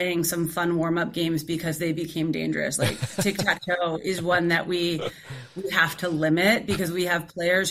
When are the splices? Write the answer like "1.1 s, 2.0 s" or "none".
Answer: none